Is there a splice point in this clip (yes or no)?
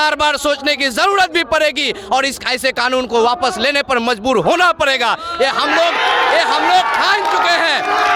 no